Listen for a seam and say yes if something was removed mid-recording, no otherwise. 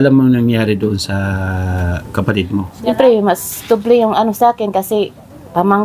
yes